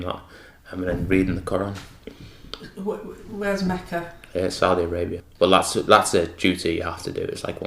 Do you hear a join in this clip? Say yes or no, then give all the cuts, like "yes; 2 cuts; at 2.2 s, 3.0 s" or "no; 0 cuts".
yes; 1 cut; at 5.2 s